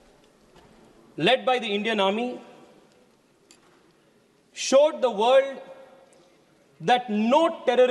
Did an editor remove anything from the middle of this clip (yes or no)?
no